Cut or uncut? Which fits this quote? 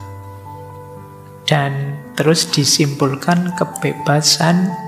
uncut